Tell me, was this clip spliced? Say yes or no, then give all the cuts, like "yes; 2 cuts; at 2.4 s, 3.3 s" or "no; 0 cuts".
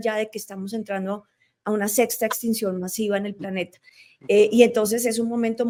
no; 0 cuts